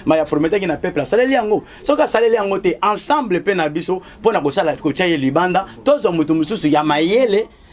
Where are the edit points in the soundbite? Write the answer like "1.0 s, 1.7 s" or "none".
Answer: none